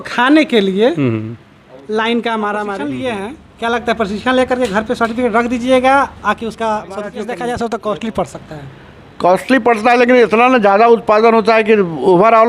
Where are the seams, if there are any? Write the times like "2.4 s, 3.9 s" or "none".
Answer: 2.9 s, 7.1 s

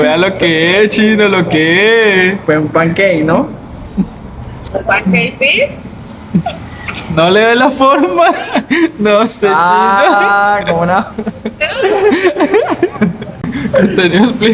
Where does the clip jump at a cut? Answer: 13.6 s

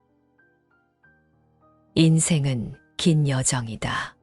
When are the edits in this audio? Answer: 1.9 s

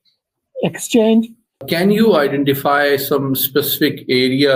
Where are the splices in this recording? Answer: 1.6 s

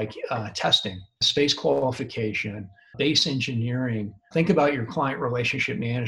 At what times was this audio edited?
1.2 s, 2.8 s, 4.3 s

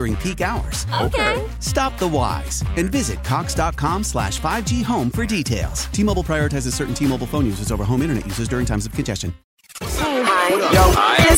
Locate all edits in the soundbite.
9.8 s

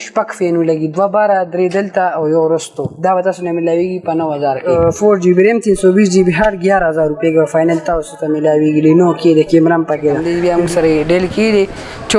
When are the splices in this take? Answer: 4.6 s, 10.3 s

